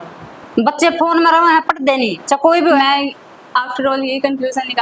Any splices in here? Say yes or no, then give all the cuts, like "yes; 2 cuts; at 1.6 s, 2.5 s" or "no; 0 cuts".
yes; 1 cut; at 2.6 s